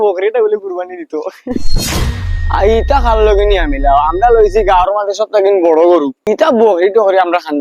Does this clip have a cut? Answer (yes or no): yes